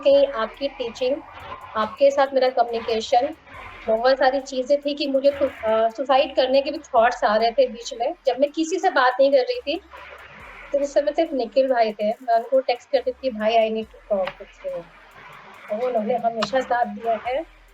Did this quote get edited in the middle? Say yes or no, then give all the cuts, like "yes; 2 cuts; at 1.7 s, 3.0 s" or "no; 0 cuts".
no; 0 cuts